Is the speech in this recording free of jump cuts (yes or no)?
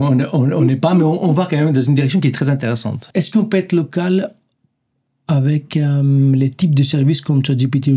no